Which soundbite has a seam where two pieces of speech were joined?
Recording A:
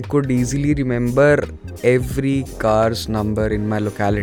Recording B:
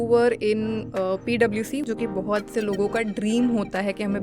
B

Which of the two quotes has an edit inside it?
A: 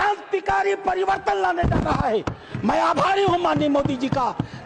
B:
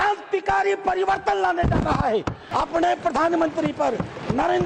B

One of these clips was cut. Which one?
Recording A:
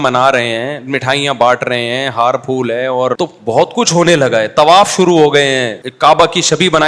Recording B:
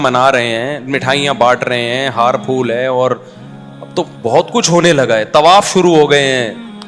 A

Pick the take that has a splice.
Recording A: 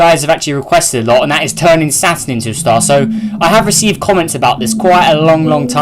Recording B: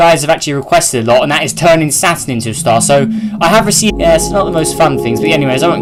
A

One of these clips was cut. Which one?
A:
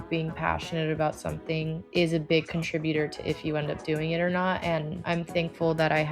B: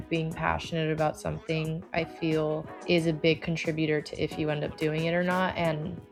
A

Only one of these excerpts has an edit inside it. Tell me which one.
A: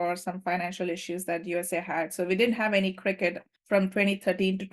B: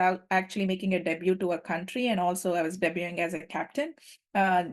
A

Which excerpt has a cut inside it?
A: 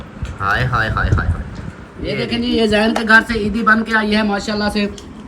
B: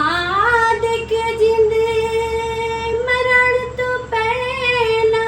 A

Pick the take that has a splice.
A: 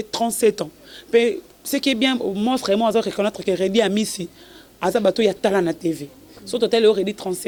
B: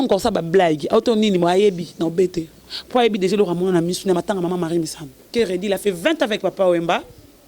B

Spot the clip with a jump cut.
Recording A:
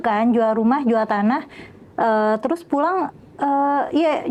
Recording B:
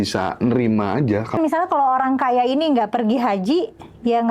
B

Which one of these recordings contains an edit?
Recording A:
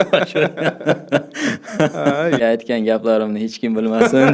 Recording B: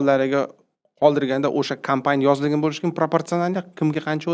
A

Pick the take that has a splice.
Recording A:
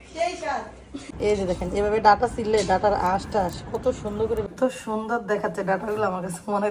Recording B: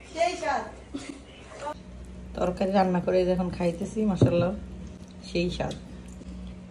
A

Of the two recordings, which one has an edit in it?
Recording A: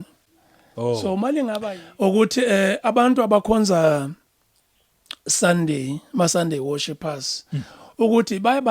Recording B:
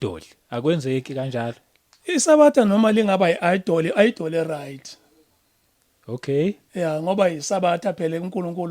A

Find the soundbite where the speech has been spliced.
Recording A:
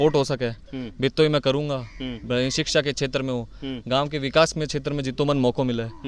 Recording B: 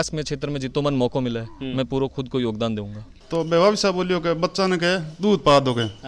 B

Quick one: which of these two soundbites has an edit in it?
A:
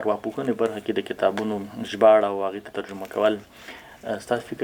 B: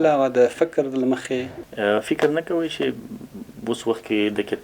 B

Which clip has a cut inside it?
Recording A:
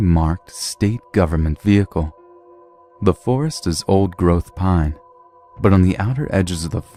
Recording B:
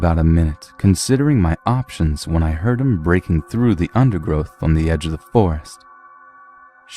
B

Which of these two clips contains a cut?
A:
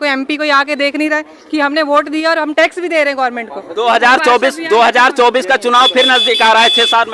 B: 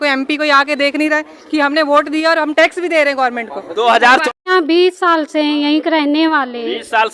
B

